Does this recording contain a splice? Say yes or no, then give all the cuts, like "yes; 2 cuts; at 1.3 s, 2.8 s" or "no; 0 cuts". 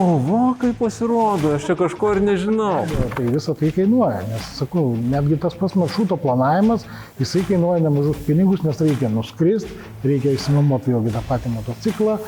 yes; 1 cut; at 3.0 s